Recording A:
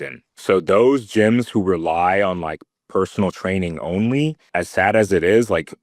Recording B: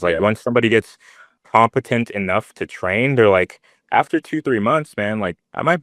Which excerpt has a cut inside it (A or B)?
A